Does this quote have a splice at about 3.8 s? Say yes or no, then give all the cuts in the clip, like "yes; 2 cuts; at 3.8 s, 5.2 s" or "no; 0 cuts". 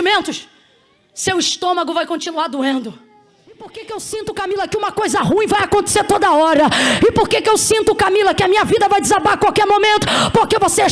yes; 1 cut; at 3.8 s